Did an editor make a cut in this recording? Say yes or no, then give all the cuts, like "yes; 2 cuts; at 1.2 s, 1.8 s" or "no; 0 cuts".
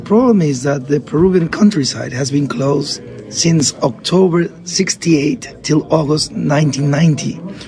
no; 0 cuts